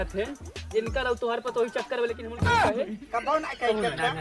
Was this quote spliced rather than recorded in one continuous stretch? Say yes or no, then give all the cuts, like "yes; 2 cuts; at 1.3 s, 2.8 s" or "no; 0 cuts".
no; 0 cuts